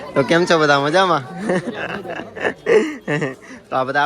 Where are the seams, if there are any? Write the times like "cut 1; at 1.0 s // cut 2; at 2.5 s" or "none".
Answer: none

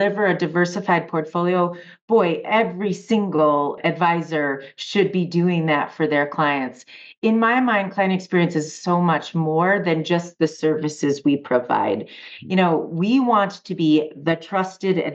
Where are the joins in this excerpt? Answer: cut 1; at 3.8 s

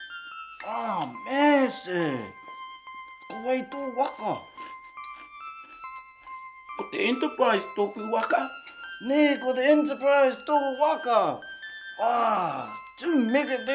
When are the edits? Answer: none

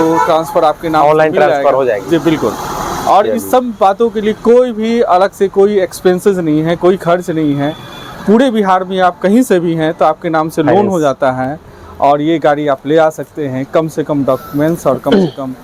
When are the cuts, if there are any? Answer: none

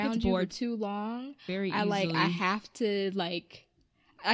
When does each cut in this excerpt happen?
none

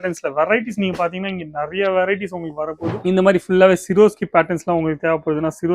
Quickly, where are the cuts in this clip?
cut 1; at 3.0 s

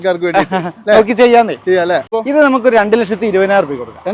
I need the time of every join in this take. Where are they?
cut 1; at 2.1 s

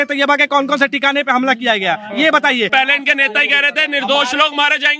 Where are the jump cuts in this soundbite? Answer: cut 1; at 2.7 s

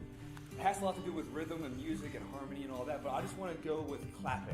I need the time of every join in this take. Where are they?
none

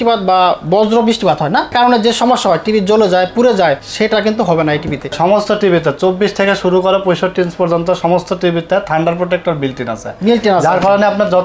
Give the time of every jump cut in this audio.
cut 1; at 1.7 s // cut 2; at 3.9 s // cut 3; at 5.1 s

